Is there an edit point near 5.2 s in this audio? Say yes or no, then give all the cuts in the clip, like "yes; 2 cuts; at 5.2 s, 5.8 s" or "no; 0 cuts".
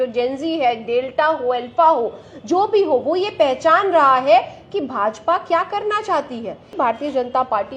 no; 1 cut; at 6.7 s